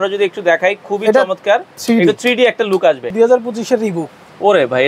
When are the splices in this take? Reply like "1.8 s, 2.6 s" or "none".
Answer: 3.1 s